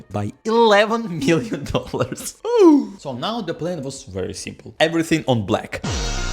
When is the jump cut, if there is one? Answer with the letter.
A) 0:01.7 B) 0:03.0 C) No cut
B